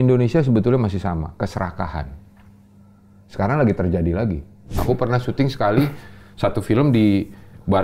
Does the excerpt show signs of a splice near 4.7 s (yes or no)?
yes